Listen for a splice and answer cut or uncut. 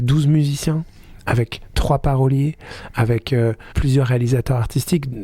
cut